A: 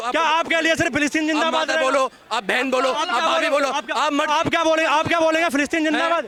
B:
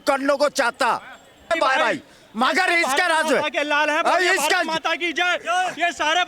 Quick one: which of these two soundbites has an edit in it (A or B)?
B